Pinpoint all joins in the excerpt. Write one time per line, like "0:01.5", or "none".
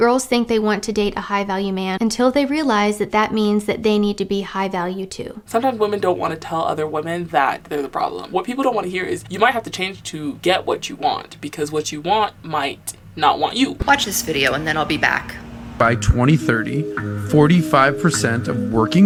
none

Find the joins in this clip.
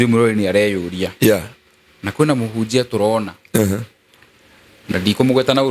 none

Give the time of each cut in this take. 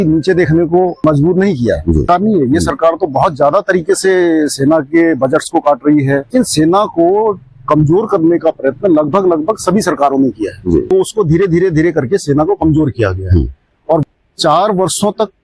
0:01.0
0:02.0
0:06.3
0:10.8
0:14.0

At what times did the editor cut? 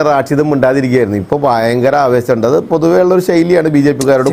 none

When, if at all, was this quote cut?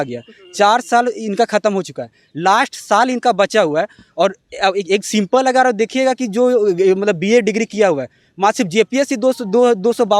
none

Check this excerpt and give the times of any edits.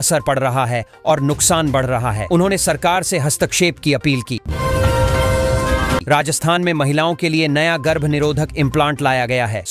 0:04.4
0:06.0

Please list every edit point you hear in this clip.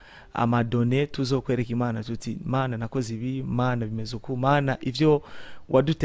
none

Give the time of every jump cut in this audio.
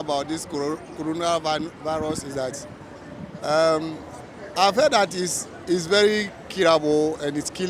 none

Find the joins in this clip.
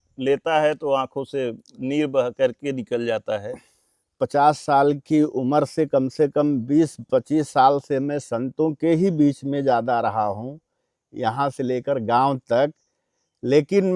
0:04.1

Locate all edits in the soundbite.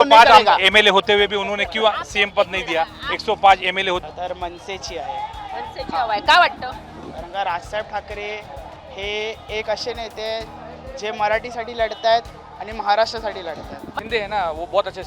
0:04.0
0:13.9

